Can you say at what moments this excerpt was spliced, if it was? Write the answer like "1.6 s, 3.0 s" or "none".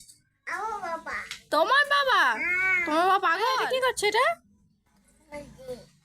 3.6 s